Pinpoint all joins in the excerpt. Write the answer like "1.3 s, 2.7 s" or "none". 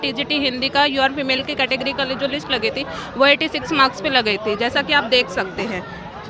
none